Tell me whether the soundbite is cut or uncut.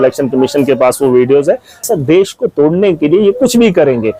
cut